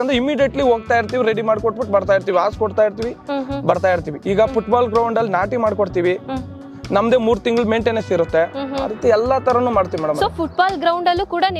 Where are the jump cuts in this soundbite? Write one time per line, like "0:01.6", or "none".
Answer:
none